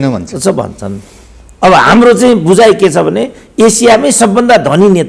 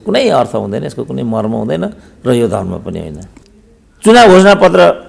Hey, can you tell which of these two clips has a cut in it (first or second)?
second